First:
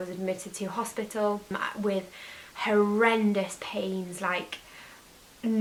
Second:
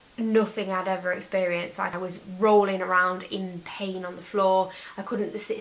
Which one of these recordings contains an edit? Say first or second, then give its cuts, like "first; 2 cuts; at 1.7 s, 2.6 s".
second; 1 cut; at 1.9 s